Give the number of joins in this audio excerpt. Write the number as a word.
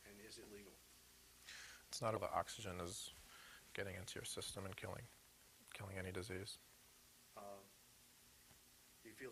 zero